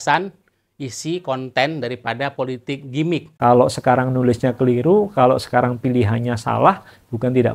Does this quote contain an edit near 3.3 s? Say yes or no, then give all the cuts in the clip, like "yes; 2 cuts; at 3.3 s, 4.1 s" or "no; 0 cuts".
yes; 1 cut; at 3.3 s